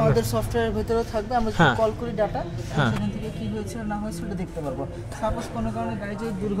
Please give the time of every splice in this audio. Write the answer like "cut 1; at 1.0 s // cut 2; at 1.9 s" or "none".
none